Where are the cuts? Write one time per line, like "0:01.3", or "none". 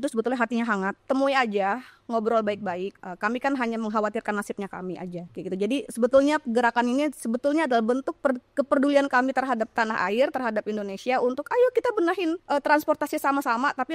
0:01.0
0:02.9
0:05.3
0:12.4